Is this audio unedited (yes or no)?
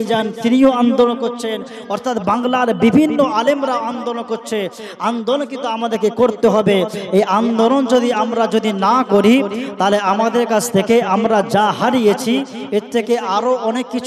yes